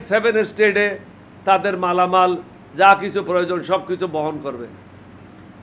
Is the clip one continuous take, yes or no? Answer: yes